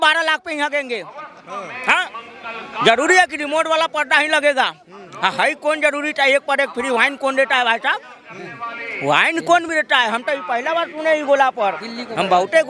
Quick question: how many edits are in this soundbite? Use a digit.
0